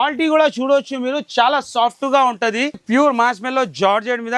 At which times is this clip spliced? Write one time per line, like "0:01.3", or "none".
0:02.8